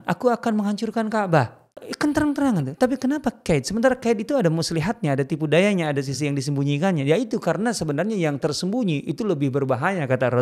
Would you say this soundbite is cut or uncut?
cut